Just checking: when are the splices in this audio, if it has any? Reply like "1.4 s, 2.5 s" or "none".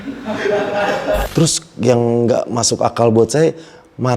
1.3 s